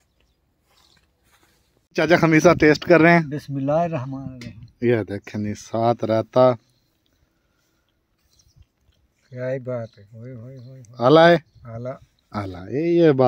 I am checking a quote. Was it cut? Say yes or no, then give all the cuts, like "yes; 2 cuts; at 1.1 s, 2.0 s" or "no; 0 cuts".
yes; 1 cut; at 1.9 s